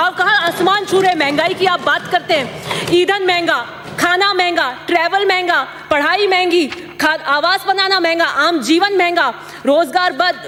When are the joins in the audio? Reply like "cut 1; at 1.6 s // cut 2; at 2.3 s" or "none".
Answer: none